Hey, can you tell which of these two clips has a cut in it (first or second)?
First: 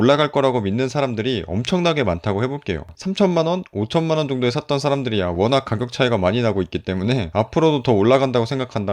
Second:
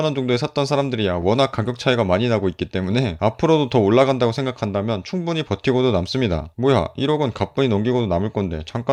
first